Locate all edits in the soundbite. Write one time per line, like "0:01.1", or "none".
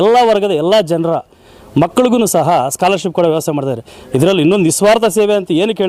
none